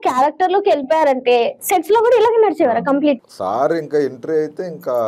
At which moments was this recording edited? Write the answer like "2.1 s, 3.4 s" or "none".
3.3 s